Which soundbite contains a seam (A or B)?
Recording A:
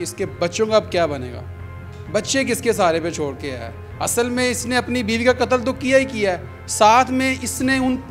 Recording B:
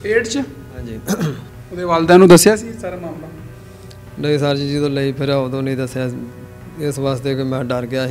B